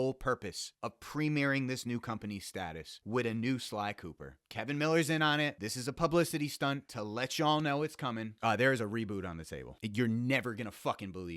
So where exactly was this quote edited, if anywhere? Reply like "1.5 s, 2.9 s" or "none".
8.3 s

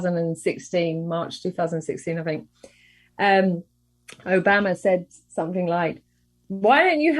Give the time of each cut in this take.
6.3 s

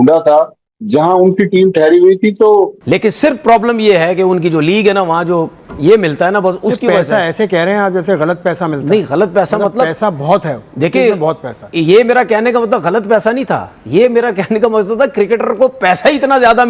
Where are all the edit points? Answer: 2.8 s, 5.6 s

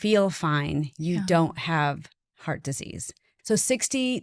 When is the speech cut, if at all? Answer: 3.3 s

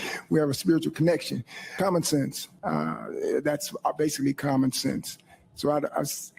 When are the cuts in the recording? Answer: 1.6 s, 2.5 s

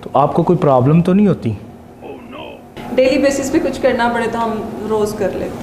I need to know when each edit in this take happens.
2.8 s

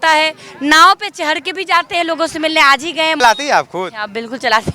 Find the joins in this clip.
3.2 s

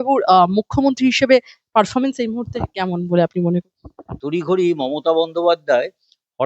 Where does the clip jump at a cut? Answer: 4.1 s

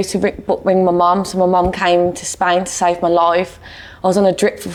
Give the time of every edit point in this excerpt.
none

